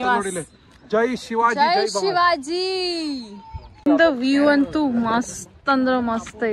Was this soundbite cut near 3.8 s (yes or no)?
yes